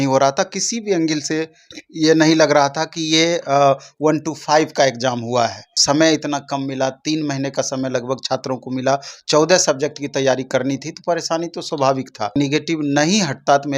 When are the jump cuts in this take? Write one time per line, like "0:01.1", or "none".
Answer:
0:05.7
0:12.3